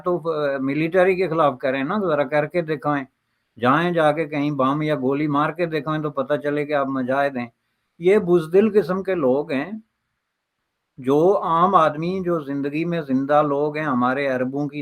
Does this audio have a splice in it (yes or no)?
no